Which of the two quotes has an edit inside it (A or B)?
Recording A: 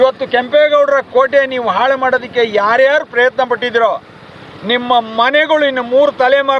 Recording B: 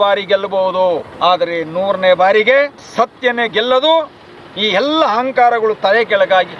B